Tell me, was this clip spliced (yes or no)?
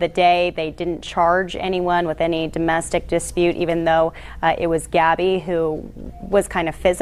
no